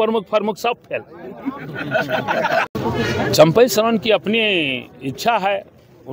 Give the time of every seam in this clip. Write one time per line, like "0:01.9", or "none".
0:02.8